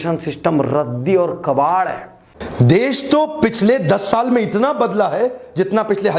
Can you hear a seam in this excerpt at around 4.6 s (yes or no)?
no